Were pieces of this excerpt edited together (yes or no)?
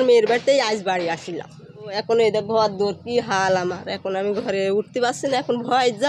yes